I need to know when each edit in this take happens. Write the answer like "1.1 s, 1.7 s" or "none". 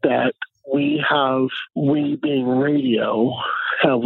1.7 s